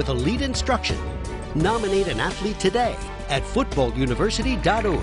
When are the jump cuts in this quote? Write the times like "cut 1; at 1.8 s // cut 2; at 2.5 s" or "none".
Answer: none